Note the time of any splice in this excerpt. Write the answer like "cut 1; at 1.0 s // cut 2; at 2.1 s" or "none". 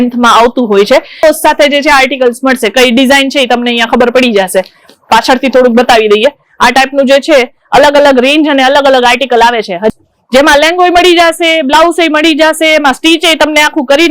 cut 1; at 1.2 s // cut 2; at 9.9 s